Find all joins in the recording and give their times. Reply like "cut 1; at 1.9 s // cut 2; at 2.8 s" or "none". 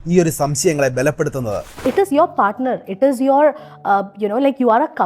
cut 1; at 1.7 s